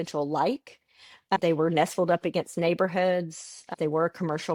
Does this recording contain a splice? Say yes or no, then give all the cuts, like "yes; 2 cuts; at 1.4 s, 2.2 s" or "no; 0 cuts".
no; 0 cuts